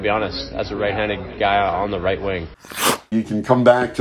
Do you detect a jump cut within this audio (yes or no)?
yes